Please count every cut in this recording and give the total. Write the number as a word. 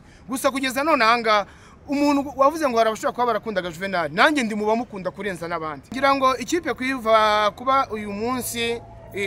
one